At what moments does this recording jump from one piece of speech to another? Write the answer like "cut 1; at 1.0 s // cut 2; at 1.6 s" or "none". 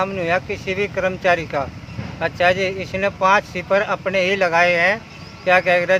none